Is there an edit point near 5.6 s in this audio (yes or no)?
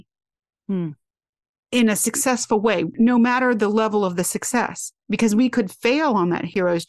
no